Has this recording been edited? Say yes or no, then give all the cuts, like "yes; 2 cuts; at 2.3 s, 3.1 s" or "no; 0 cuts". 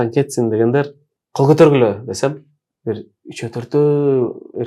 no; 0 cuts